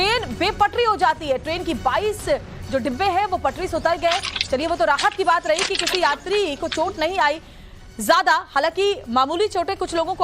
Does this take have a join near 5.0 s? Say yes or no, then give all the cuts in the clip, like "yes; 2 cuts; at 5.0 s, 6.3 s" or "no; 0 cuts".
yes; 1 cut; at 5.0 s